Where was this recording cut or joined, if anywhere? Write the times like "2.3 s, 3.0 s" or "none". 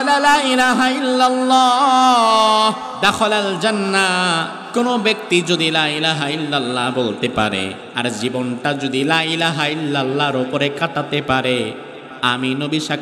2.9 s, 4.6 s, 7.8 s